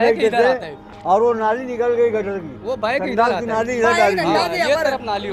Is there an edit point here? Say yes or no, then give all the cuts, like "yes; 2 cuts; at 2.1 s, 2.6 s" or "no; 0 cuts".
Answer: no; 0 cuts